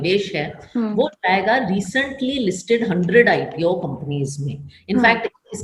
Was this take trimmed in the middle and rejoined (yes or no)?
no